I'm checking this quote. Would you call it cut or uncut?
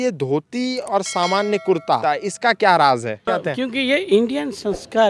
cut